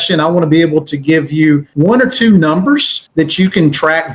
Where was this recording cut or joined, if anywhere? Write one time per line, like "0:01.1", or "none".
0:01.7
0:03.0

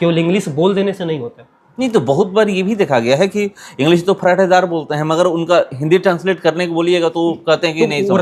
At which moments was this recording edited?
none

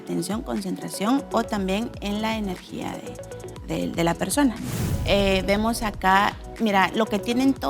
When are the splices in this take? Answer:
0:04.7

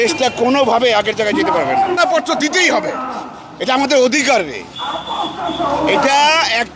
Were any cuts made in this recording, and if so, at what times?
0:02.0

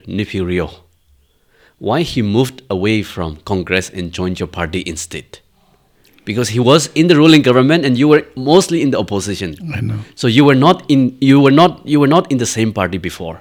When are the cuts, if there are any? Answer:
none

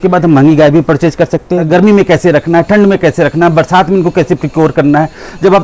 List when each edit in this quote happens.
0:01.6

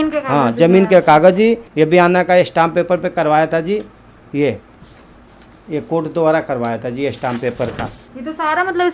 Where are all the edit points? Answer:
none

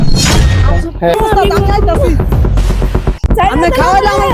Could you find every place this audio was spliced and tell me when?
0:01.1

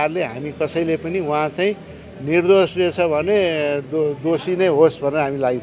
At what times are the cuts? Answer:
none

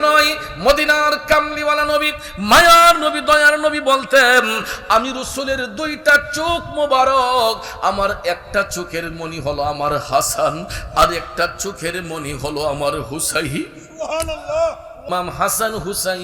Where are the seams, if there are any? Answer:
0:15.1

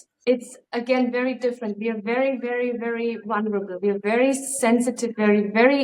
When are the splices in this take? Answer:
none

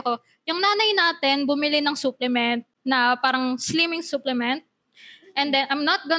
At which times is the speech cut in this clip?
none

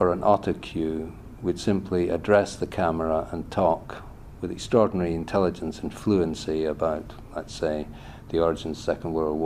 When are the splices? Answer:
0:05.3

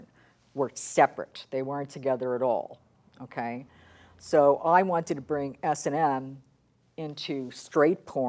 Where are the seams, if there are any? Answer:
none

